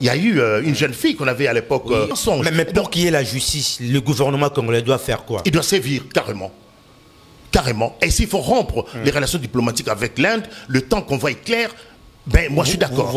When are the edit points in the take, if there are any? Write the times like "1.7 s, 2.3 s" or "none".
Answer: 2.1 s